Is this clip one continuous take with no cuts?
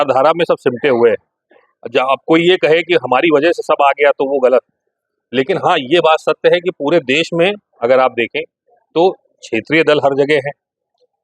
yes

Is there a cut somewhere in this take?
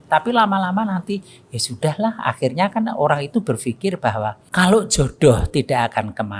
yes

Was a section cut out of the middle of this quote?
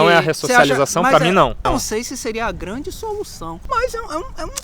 yes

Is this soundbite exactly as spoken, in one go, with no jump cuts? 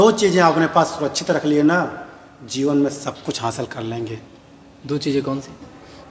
yes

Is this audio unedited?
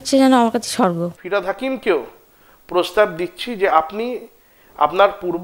no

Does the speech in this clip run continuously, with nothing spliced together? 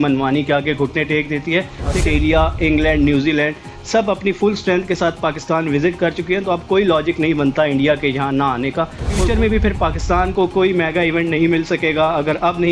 no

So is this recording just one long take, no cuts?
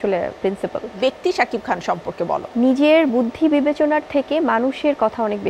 no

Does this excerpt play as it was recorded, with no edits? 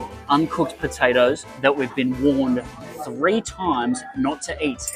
no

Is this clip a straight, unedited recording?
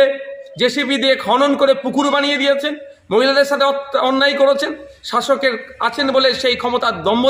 yes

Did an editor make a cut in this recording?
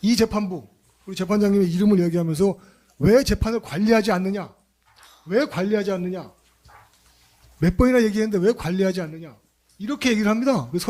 no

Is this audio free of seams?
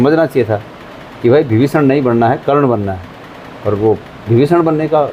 yes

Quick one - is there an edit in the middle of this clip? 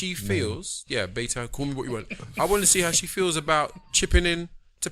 no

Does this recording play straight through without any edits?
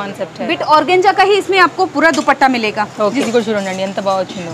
no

